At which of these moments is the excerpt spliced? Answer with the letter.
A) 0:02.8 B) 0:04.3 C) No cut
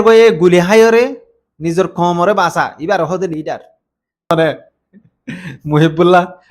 B